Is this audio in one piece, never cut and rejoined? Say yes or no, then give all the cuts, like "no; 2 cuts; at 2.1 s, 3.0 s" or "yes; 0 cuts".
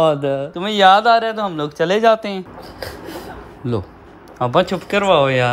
yes; 0 cuts